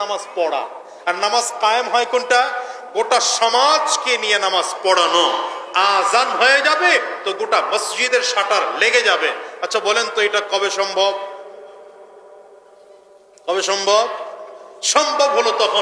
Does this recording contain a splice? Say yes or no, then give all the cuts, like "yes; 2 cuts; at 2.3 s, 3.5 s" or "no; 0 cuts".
no; 0 cuts